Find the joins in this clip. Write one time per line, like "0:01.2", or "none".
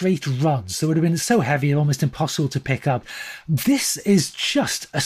0:03.2